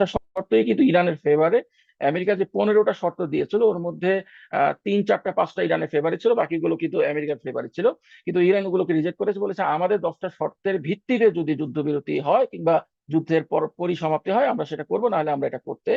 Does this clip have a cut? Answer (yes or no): no